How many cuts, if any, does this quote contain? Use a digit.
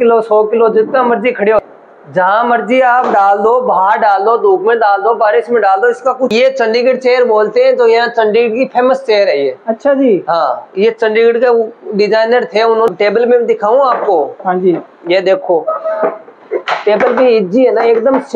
3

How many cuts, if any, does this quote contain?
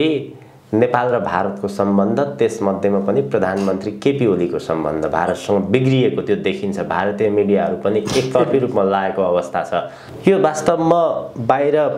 0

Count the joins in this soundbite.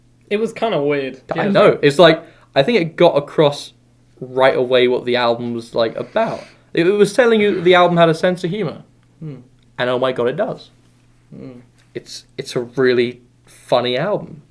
1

